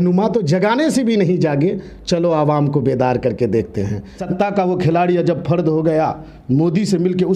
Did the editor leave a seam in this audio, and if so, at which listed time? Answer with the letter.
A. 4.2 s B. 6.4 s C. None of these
A